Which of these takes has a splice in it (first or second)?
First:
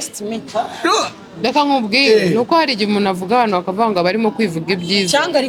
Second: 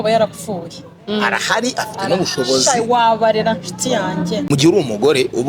second